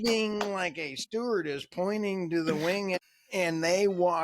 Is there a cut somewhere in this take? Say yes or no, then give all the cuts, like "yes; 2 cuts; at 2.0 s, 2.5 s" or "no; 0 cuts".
yes; 1 cut; at 2.9 s